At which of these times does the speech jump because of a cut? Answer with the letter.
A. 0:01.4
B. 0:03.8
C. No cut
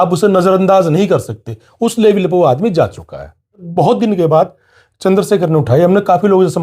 B